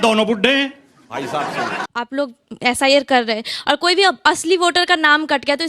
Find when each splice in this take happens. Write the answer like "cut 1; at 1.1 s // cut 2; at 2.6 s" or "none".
cut 1; at 1.9 s